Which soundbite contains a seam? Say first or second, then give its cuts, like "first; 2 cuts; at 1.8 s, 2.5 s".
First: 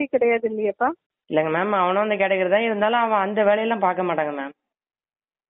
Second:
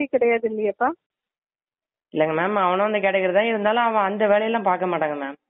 first; 1 cut; at 1.1 s